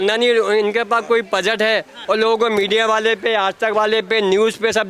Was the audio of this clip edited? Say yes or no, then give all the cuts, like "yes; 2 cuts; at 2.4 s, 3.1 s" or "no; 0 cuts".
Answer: yes; 1 cut; at 1.9 s